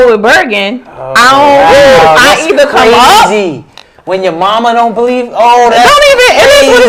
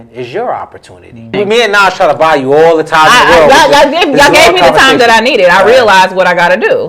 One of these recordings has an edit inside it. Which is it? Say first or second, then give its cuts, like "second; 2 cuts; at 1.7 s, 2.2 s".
second; 1 cut; at 1.3 s